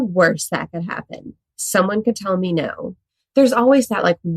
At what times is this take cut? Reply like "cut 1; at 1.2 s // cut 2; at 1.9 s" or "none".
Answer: cut 1; at 3.1 s